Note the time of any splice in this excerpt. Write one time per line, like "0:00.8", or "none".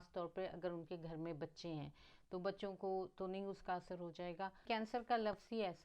0:04.6

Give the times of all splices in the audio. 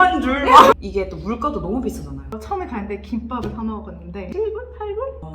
0:00.8
0:02.3
0:04.2

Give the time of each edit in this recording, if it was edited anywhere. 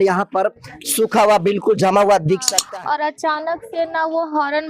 0:02.6

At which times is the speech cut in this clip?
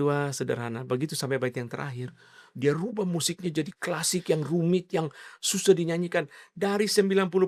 none

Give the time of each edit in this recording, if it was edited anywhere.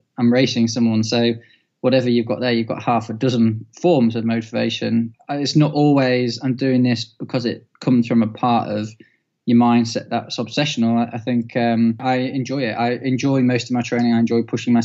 0:05.2
0:12.0

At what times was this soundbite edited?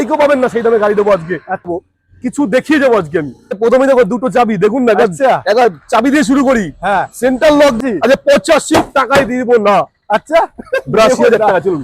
0:01.7
0:03.6
0:07.8

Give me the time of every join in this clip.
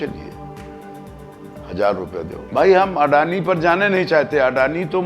0:02.4

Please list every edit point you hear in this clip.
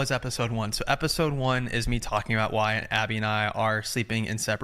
none

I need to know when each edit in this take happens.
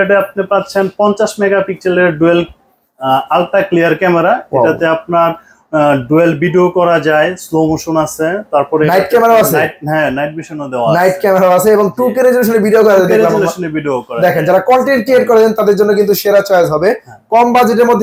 none

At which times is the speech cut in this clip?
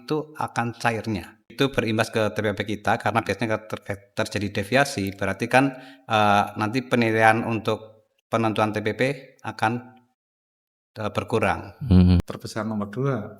0:01.5
0:12.2

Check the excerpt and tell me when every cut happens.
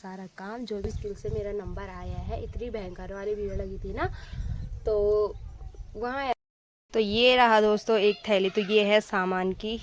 0:00.9
0:06.3

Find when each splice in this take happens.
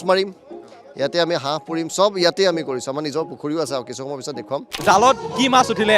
0:04.7

